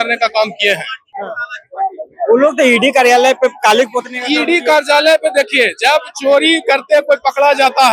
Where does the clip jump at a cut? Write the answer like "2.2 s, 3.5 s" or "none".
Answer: none